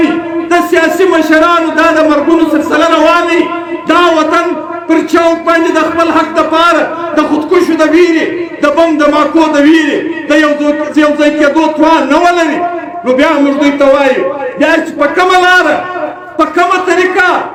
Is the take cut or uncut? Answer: uncut